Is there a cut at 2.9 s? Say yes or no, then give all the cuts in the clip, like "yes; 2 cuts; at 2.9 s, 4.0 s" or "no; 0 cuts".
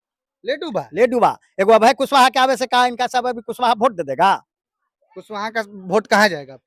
no; 0 cuts